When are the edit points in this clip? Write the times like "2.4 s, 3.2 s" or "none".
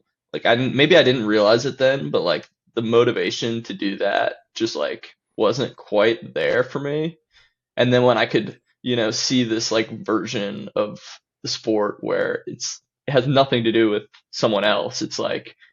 none